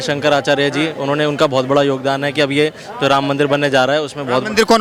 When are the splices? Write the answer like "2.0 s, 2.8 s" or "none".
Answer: none